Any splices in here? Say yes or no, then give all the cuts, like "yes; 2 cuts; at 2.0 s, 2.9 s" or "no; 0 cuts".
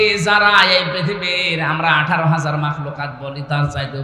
no; 0 cuts